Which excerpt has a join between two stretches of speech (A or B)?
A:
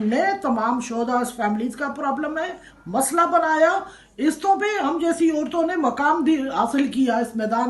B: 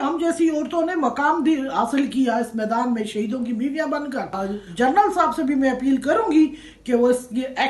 B